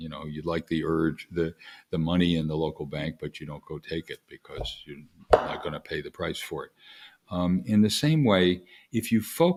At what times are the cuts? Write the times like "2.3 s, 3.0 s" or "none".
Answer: none